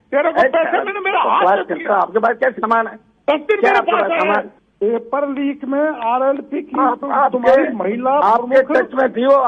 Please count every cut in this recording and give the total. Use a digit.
1